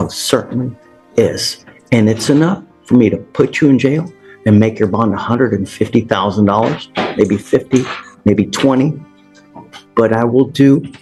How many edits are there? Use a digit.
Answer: 0